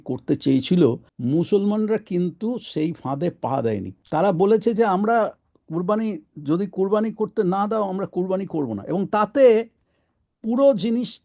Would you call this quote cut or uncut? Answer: cut